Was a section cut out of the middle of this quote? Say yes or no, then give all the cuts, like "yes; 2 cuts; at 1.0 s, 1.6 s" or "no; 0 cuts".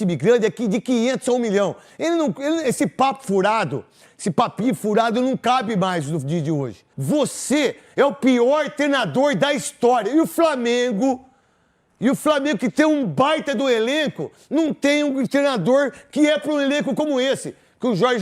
yes; 1 cut; at 6.9 s